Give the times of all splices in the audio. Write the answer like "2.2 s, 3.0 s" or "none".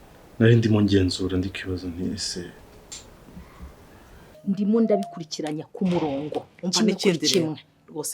4.3 s